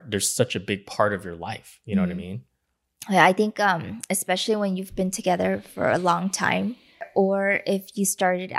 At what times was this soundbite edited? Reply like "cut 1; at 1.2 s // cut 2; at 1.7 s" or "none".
cut 1; at 7.1 s